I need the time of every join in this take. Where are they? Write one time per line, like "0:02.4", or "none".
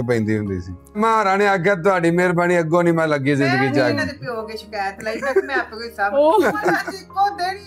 0:01.0